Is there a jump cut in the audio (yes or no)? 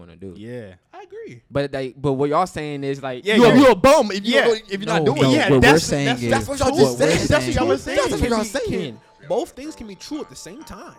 no